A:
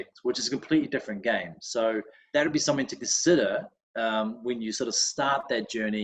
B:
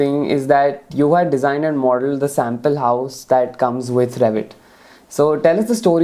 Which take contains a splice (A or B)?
A